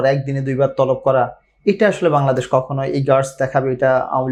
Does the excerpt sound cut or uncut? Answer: uncut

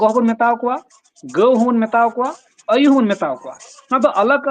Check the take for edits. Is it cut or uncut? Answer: uncut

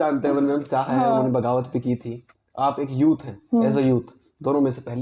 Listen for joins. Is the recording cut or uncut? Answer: uncut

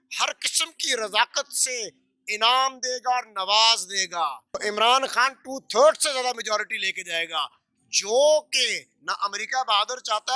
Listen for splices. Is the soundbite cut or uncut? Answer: cut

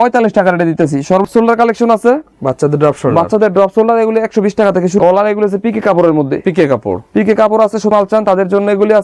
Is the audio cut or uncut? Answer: cut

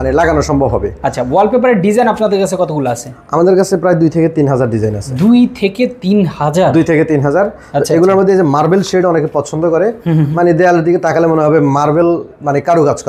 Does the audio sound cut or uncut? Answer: uncut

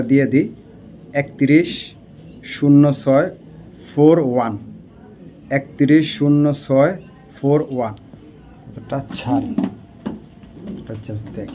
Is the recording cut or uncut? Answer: uncut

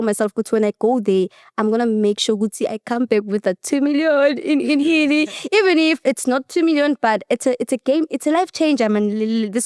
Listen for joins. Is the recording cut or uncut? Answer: uncut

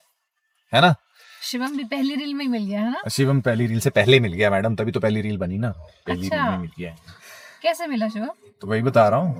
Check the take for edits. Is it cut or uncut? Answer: uncut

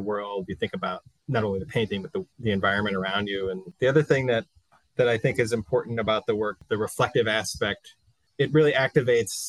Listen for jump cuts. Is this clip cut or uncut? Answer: cut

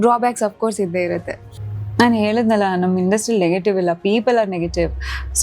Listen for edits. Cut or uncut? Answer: cut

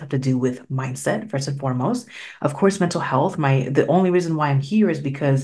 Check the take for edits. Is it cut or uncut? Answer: uncut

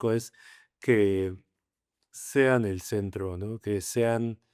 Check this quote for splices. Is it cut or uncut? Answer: uncut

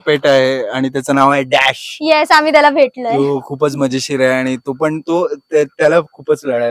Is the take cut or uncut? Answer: uncut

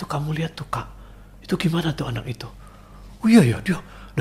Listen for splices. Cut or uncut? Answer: uncut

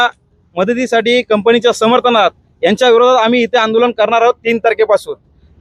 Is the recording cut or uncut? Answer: uncut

